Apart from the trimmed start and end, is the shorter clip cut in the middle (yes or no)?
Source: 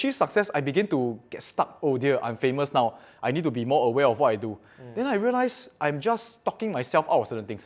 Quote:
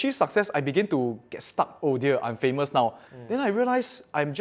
yes